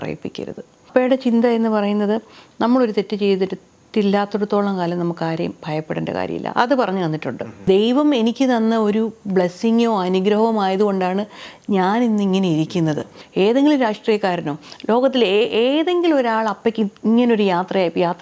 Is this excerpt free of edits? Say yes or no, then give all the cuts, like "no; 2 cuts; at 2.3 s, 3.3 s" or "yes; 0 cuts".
no; 3 cuts; at 0.9 s, 7.5 s, 13.2 s